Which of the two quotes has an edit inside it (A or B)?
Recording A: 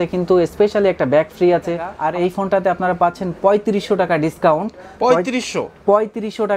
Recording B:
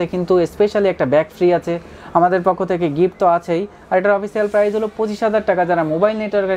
A